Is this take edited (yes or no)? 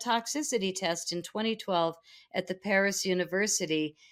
no